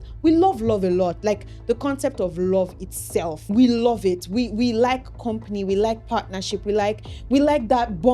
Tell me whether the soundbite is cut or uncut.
cut